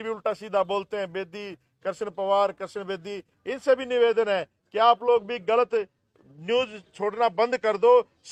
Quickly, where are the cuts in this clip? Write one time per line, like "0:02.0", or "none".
none

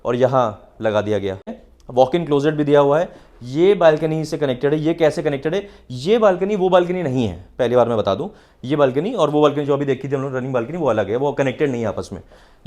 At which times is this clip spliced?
0:01.6

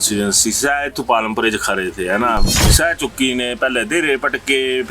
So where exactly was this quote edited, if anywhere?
0:02.6

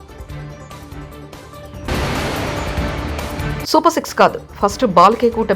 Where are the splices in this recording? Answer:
0:01.9

